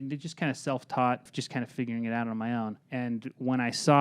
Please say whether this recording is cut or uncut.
cut